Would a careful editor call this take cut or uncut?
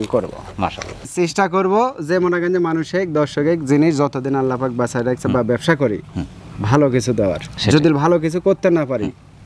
cut